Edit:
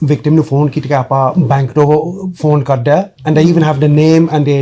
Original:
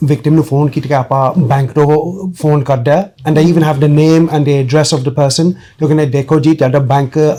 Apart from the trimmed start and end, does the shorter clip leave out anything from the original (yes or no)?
no